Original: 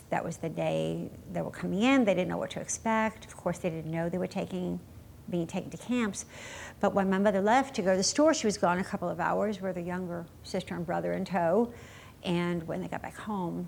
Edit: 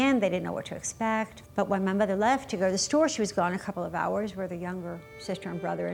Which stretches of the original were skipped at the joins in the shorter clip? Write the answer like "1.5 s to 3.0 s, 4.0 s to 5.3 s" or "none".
3.2 s to 6.7 s